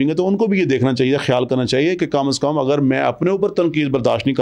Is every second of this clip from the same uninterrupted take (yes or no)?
yes